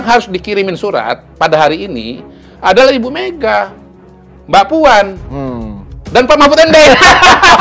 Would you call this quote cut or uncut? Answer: uncut